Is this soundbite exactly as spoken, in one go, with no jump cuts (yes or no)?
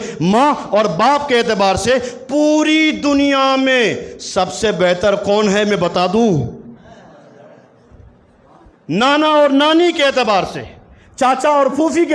yes